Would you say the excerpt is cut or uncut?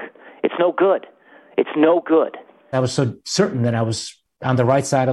cut